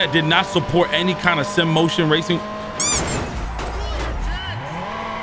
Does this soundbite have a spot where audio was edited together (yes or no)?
no